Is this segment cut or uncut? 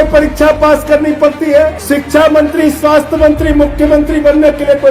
cut